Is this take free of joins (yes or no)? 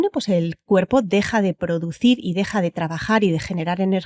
yes